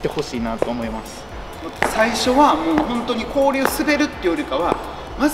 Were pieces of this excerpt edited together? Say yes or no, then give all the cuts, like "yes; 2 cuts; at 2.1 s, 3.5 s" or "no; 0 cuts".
yes; 1 cut; at 1.6 s